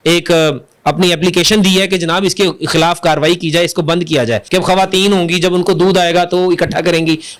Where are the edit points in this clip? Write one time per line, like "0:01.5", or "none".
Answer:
0:04.4